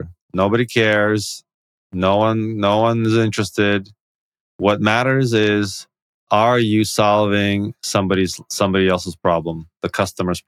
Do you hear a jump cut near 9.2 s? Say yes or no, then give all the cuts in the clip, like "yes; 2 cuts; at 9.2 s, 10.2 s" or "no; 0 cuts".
no; 0 cuts